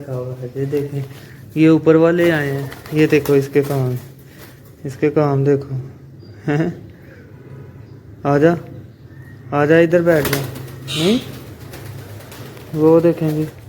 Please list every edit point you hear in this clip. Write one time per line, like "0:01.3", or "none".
none